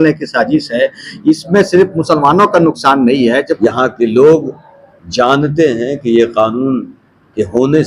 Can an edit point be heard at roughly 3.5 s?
yes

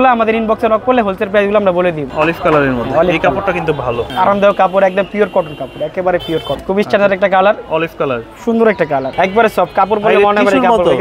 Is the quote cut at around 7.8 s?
no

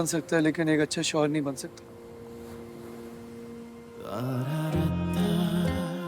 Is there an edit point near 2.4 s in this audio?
no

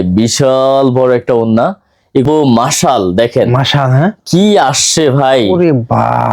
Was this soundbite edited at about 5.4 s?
no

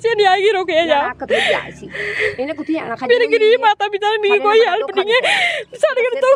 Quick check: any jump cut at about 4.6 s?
no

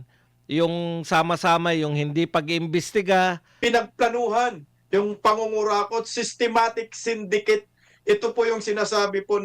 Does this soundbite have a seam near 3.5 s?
yes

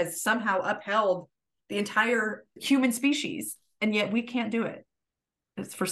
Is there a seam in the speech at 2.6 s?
yes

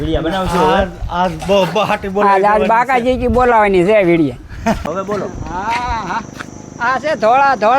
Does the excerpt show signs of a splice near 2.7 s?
no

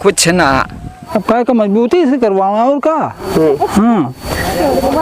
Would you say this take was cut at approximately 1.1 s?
yes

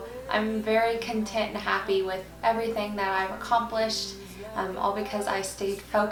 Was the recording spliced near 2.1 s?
no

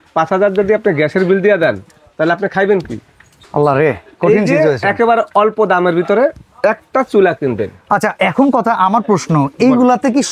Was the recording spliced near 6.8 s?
no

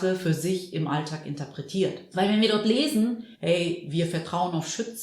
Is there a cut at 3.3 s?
yes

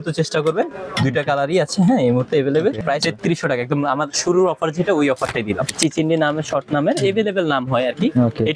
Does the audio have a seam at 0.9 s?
no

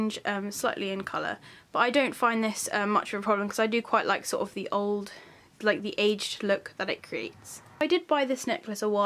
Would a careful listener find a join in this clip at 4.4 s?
no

